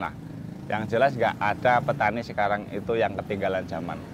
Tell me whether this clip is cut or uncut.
uncut